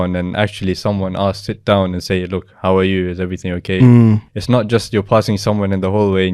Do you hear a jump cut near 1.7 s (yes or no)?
no